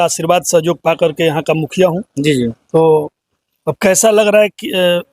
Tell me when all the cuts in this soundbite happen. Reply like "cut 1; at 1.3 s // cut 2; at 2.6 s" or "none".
none